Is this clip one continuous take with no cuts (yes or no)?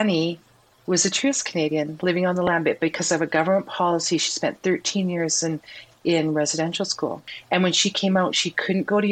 no